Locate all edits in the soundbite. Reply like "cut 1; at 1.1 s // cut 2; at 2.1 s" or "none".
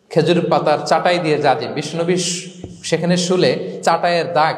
none